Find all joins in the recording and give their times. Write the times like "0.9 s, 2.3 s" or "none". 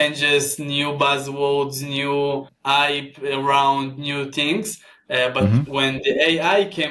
2.5 s